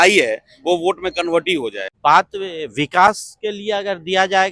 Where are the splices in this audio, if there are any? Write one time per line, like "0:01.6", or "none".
0:01.9